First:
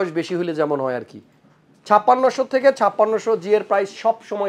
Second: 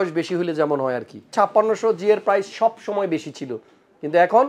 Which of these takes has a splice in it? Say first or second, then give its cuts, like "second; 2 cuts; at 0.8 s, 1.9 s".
second; 1 cut; at 1.3 s